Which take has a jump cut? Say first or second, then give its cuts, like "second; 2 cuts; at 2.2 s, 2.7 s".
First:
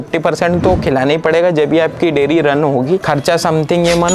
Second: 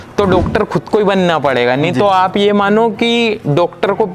first; 1 cut; at 3.0 s